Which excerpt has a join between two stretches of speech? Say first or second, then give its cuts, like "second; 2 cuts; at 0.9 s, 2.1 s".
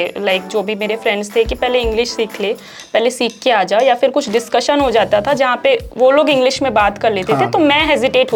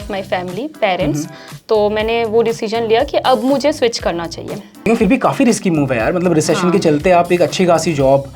second; 1 cut; at 4.9 s